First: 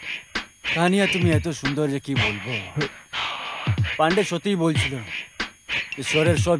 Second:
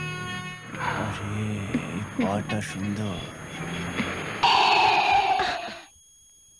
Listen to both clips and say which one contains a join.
second; 1 cut; at 4.4 s

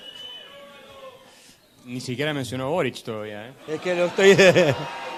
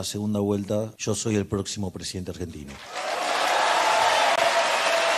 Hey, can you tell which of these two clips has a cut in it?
second; 1 cut; at 1.0 s

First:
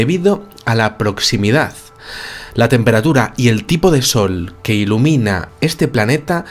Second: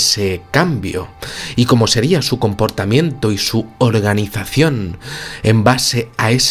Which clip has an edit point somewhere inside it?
first; 1 cut; at 4.3 s

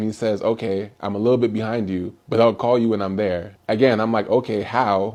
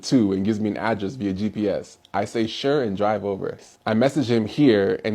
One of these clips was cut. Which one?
second; 1 cut; at 3.7 s

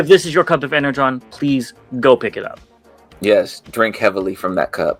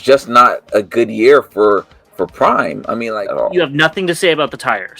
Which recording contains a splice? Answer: second; 1 cut; at 3.0 s

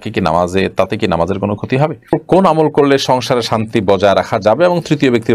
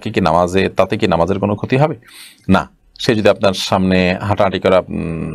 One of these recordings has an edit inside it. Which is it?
first; 1 cut; at 2.2 s

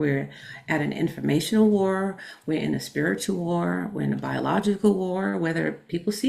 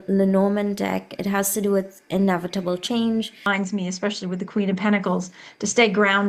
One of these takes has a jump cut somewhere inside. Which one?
second; 1 cut; at 3.5 s

